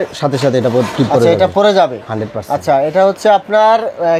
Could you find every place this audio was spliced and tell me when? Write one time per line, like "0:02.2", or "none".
none